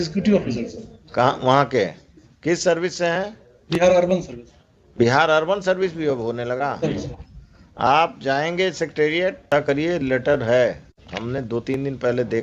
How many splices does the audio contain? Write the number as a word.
one